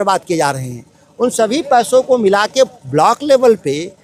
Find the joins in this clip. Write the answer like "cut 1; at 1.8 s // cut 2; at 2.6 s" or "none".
none